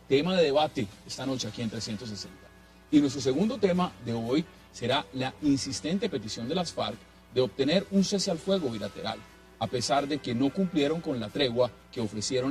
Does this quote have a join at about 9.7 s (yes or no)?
yes